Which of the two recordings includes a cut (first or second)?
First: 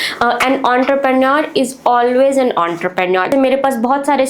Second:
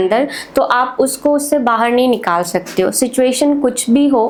first